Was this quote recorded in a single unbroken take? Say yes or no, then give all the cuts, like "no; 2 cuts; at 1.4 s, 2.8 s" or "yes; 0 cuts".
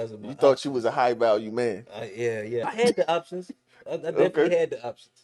no; 1 cut; at 2.7 s